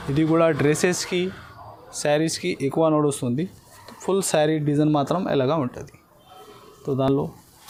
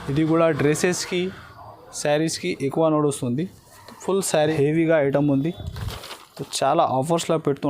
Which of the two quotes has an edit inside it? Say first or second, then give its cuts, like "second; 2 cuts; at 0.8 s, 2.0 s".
second; 1 cut; at 4.5 s